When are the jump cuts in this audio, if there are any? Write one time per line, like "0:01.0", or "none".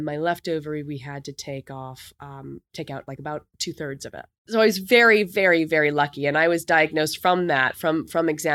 0:04.5